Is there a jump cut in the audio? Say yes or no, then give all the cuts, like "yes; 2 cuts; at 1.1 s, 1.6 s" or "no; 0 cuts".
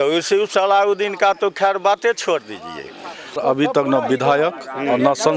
yes; 1 cut; at 3.4 s